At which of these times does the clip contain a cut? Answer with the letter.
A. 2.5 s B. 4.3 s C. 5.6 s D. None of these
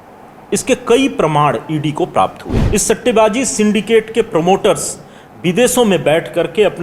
A